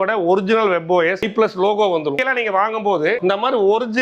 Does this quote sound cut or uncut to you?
cut